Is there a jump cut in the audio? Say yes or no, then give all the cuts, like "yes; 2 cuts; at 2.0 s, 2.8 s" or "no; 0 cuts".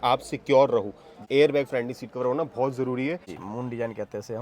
yes; 2 cuts; at 1.2 s, 3.3 s